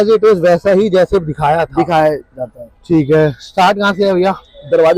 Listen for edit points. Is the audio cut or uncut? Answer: uncut